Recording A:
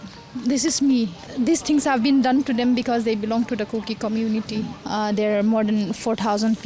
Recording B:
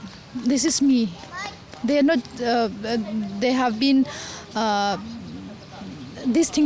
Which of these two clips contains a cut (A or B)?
A